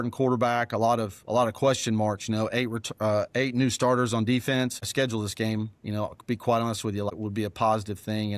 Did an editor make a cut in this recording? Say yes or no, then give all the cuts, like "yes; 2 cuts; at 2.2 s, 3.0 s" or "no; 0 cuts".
yes; 2 cuts; at 4.8 s, 7.1 s